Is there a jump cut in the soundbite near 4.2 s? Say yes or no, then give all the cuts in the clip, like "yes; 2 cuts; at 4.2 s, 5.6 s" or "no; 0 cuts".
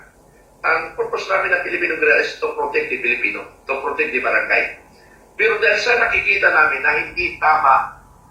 yes; 1 cut; at 4.2 s